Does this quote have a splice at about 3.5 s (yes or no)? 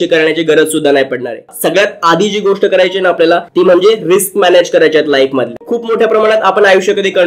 no